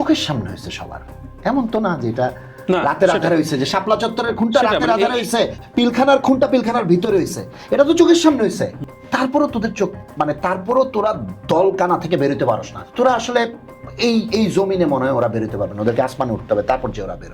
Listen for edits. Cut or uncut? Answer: cut